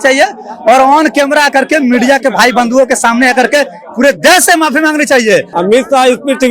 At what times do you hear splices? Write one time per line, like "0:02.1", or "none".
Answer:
0:05.5